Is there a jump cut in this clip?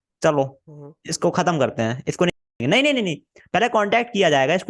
no; 0 cuts

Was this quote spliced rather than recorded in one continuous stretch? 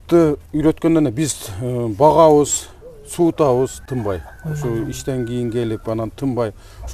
no; 0 cuts

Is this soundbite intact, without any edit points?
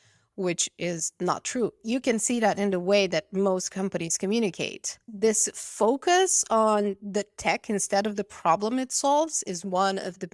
no; 2 cuts; at 1.8 s, 5.0 s

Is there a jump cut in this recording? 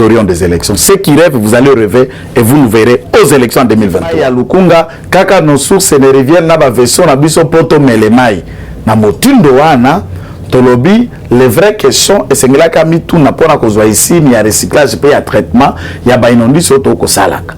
yes; 1 cut; at 4.2 s

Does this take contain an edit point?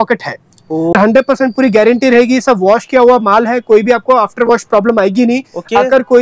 yes; 1 cut; at 0.9 s

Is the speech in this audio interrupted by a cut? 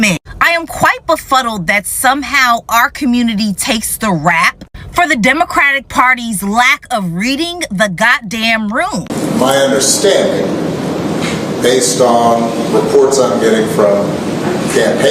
yes; 1 cut; at 9.1 s

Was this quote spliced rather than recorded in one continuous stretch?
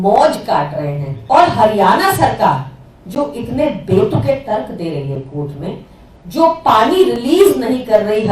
yes; 1 cut; at 1.1 s

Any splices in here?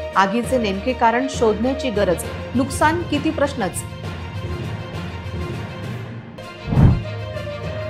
no; 0 cuts

